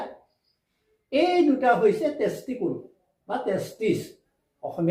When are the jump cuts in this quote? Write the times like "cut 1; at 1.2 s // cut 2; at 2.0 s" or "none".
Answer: none